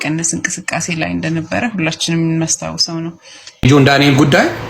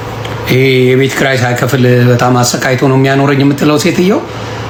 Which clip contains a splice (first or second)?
first